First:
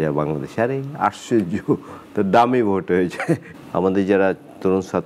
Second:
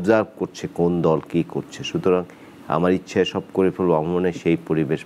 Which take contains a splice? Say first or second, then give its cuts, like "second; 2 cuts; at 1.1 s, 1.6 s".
first; 1 cut; at 3.6 s